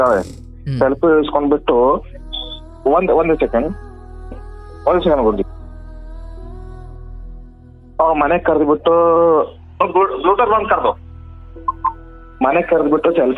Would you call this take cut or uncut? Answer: uncut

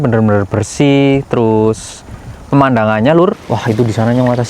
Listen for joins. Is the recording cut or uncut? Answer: cut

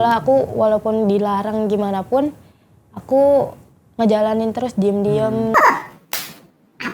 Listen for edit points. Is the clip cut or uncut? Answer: cut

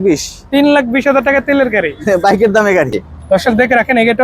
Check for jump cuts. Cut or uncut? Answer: cut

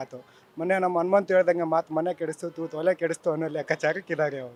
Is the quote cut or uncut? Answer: uncut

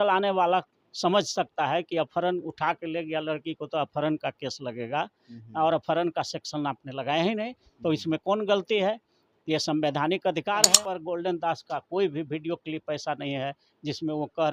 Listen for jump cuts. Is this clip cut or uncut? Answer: cut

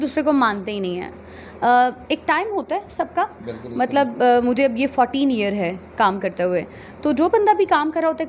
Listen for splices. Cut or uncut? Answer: uncut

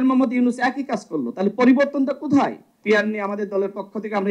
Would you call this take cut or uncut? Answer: cut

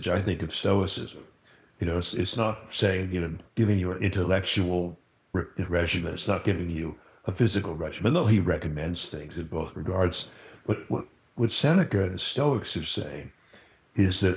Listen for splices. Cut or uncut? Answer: cut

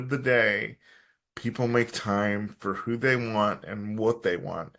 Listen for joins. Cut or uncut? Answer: uncut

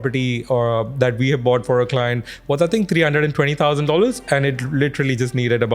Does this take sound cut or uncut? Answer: uncut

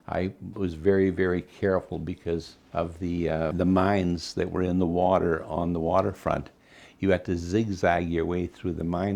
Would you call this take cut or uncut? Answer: cut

